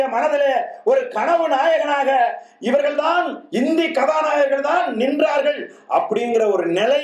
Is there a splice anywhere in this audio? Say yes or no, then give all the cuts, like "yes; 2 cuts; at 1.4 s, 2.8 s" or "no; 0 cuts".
no; 0 cuts